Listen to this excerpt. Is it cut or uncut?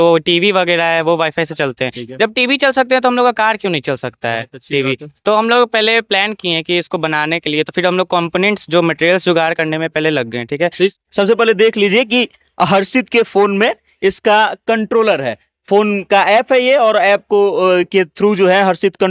cut